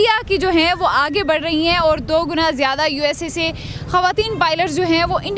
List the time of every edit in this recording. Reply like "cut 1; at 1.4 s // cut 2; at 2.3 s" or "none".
none